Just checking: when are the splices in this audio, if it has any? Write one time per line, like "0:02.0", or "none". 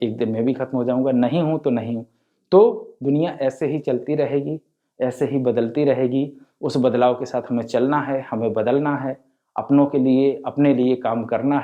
none